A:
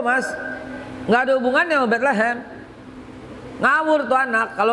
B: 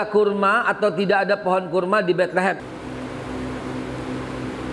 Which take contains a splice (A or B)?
B